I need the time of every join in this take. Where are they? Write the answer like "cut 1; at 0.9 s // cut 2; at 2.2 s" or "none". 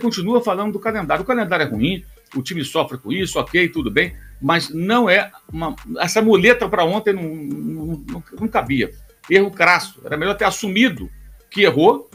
none